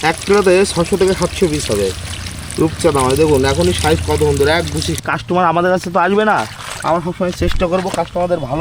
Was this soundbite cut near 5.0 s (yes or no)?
yes